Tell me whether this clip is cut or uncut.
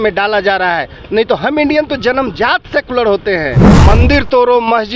cut